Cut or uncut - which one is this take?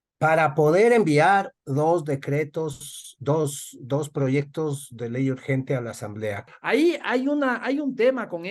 cut